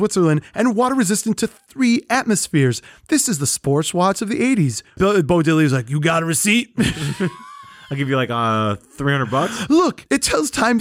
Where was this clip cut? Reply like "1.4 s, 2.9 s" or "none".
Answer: 4.9 s